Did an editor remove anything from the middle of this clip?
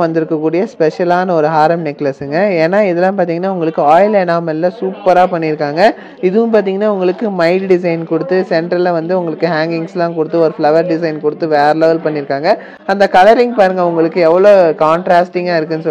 no; 0 cuts

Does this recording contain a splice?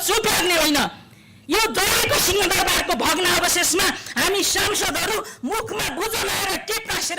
no; 0 cuts

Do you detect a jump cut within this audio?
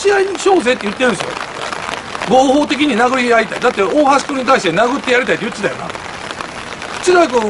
no; 0 cuts

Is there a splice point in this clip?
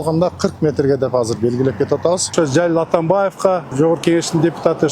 yes; 2 cuts; at 2.3 s, 3.7 s

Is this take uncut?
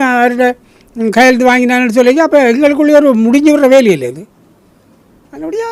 yes; 0 cuts

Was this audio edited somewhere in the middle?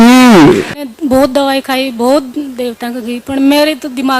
yes; 1 cut; at 0.9 s

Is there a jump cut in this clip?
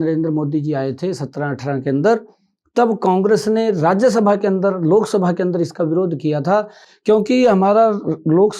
no; 0 cuts

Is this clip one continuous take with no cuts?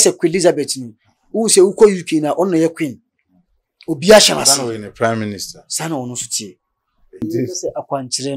no; 1 cut; at 7.2 s

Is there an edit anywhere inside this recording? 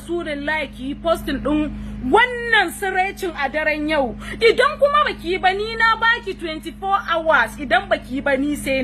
no; 0 cuts

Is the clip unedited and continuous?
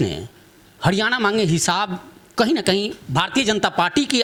yes; 0 cuts

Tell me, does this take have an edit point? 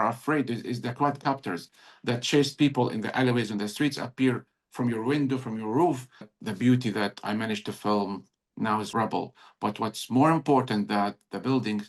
yes; 2 cuts; at 6.4 s, 8.9 s

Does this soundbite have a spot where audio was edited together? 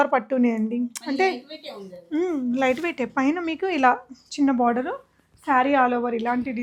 no; 0 cuts

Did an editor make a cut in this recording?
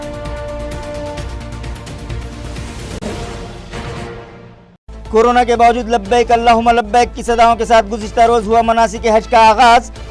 no; 0 cuts

